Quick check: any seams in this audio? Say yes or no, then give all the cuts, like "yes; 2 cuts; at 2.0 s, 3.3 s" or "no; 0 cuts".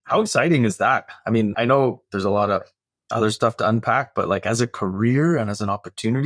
yes; 1 cut; at 1.5 s